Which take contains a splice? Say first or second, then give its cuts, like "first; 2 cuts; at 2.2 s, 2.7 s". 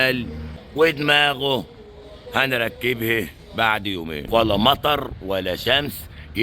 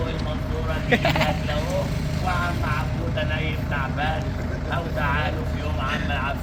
first; 1 cut; at 4.1 s